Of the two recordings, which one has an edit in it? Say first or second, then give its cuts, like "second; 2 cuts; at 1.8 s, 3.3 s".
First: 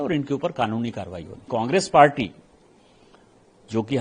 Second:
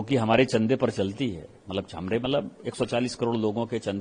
first; 1 cut; at 1.5 s